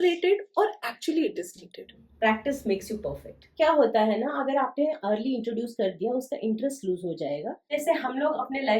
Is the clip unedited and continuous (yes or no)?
no